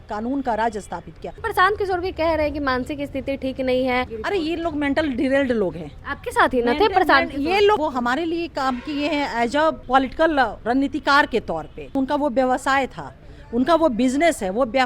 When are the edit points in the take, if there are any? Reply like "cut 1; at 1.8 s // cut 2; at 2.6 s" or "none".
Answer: cut 1; at 1.4 s // cut 2; at 4.2 s // cut 3; at 7.8 s // cut 4; at 9.8 s // cut 5; at 10.6 s // cut 6; at 11.9 s